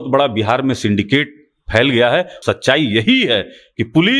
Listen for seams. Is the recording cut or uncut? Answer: cut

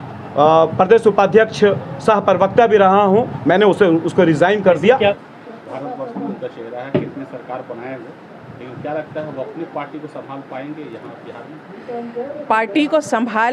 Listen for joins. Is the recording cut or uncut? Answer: cut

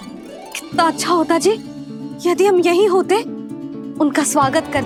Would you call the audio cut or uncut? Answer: uncut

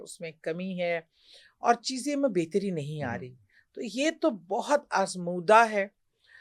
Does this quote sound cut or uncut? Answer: uncut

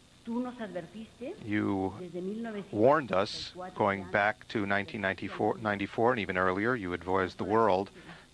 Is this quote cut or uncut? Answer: cut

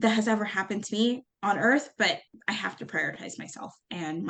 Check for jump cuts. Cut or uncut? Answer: cut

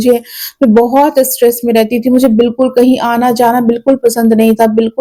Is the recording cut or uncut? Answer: uncut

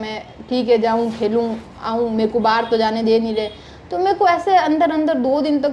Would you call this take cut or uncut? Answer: uncut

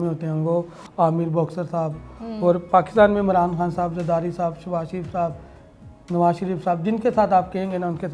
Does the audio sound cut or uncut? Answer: uncut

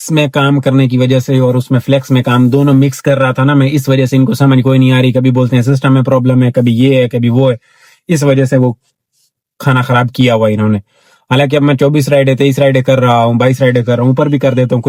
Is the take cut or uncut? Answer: uncut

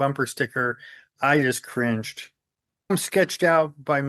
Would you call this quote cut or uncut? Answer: cut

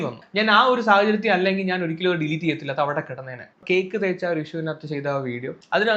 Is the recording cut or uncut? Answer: cut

